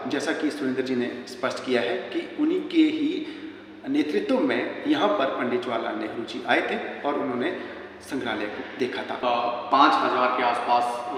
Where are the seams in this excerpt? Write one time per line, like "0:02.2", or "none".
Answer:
0:09.2